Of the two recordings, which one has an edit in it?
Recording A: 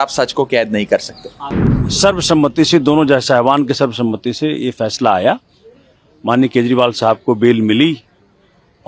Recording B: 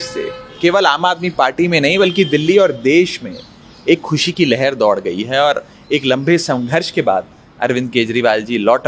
A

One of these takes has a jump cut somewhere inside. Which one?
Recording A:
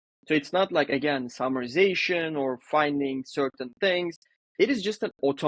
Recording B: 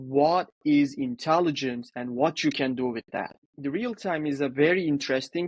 B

